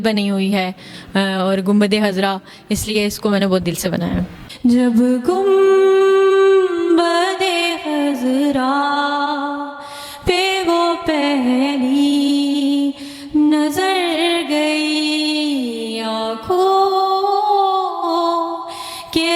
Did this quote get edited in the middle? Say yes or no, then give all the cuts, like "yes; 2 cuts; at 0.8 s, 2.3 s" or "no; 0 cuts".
yes; 1 cut; at 4.3 s